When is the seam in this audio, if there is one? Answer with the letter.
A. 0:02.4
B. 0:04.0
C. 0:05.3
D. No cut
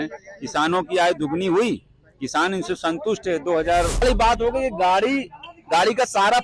B